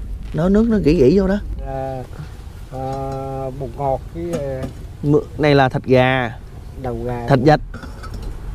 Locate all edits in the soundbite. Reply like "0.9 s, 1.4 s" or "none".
1.7 s